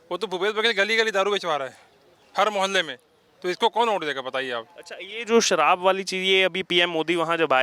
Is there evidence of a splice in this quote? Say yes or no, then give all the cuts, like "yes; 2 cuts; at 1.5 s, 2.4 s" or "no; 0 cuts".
no; 0 cuts